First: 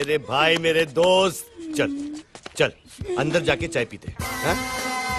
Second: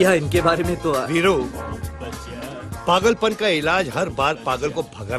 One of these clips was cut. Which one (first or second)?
second